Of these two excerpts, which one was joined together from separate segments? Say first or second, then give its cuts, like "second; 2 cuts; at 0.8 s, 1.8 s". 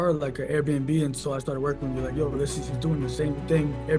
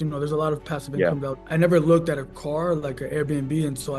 second; 1 cut; at 1.4 s